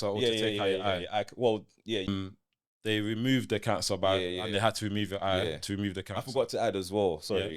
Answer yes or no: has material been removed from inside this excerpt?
yes